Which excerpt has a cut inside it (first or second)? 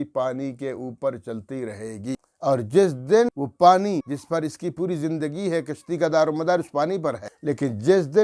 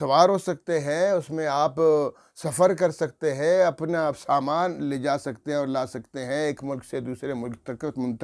first